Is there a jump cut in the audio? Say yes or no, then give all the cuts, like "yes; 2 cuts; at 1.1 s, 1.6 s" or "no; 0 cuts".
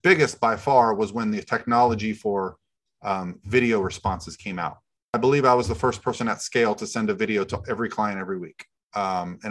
yes; 1 cut; at 5.2 s